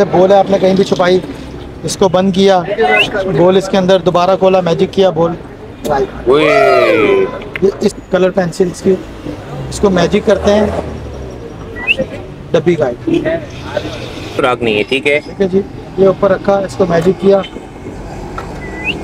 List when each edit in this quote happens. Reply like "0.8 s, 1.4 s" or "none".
7.9 s, 14.4 s